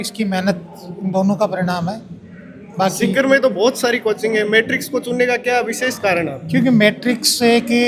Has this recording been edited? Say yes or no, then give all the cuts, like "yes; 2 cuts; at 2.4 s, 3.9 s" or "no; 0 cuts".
no; 0 cuts